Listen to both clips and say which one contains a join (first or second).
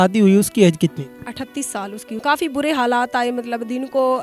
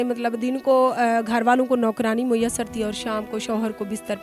first